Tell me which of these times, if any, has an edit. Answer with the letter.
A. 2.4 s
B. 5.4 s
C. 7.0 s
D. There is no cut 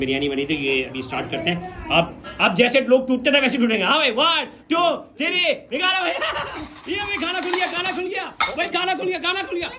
D